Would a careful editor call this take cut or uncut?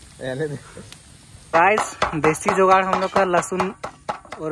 cut